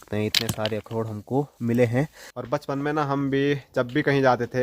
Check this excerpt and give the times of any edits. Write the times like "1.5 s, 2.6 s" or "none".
2.3 s

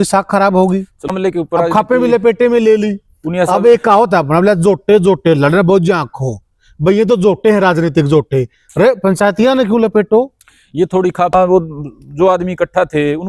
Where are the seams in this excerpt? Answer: 1.1 s, 11.3 s

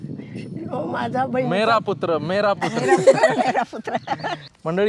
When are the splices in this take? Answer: none

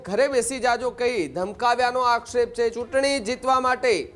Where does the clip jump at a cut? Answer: 2.7 s

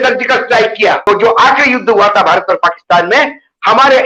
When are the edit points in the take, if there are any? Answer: 1.0 s

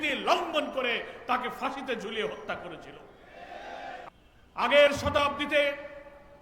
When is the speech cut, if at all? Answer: 4.1 s

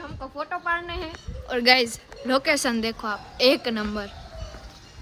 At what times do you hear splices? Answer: none

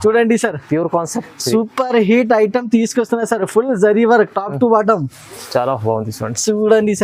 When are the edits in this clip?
none

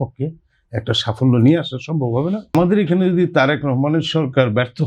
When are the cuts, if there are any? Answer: 2.5 s

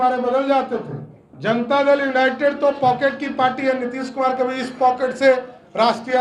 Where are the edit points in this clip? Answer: 1.3 s

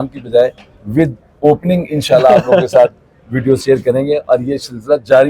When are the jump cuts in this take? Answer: none

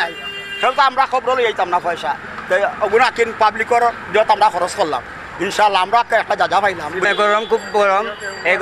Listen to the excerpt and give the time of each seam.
none

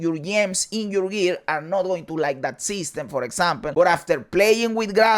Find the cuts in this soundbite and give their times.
3.6 s

